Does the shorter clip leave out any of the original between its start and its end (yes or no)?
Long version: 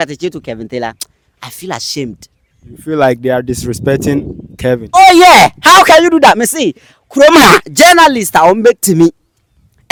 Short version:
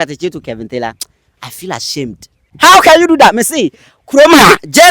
yes